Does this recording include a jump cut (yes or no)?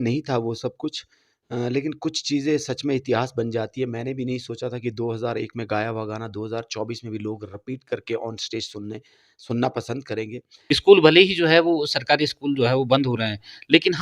yes